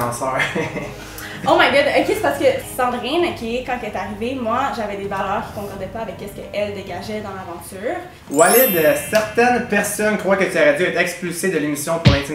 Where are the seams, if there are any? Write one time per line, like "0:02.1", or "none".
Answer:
0:02.6
0:08.3